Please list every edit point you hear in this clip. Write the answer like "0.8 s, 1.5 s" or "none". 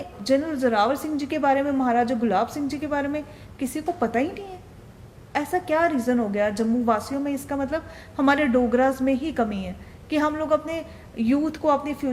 none